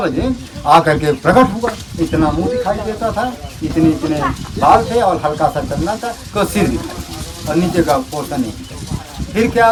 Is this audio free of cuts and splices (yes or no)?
yes